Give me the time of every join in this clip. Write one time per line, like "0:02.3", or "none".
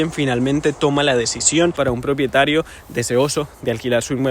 0:01.8

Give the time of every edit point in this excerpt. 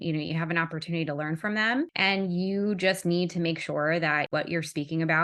0:04.3

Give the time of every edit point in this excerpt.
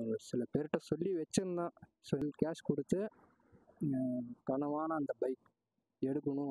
0:02.2

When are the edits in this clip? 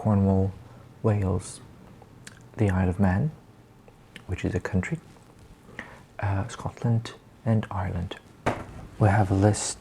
0:08.5

